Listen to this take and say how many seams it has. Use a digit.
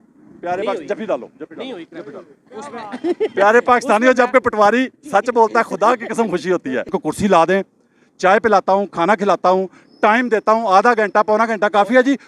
1